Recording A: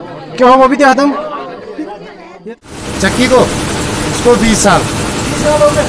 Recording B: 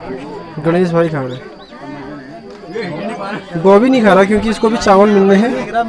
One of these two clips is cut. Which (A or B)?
A